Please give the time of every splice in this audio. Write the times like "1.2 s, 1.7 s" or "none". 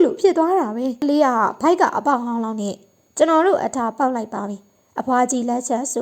1.0 s